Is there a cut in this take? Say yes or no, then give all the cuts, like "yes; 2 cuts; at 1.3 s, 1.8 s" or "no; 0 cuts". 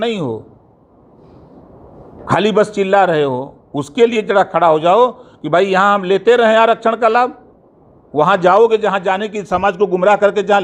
no; 0 cuts